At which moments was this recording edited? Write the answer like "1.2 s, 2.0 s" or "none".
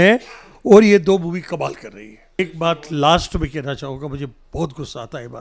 2.4 s